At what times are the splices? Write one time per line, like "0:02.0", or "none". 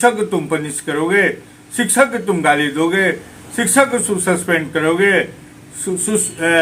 none